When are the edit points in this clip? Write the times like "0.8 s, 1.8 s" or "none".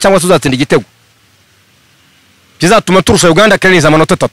none